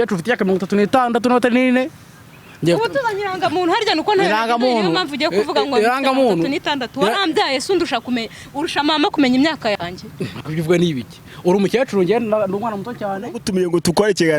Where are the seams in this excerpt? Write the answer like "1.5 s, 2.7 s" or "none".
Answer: 13.4 s